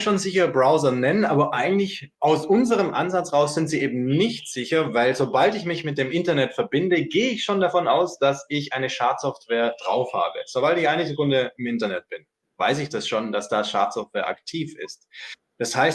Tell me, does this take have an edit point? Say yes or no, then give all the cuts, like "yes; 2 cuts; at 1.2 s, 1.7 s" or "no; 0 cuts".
yes; 1 cut; at 2.0 s